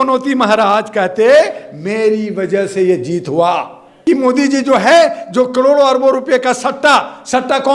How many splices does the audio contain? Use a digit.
1